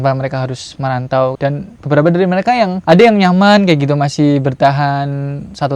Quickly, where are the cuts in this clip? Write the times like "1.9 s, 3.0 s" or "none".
1.4 s